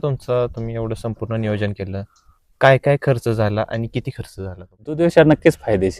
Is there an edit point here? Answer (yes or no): yes